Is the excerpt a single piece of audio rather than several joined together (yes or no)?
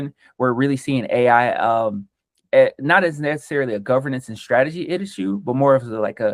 yes